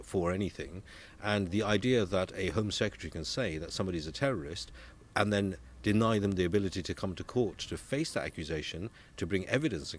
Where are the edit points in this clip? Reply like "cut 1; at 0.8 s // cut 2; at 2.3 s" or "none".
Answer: none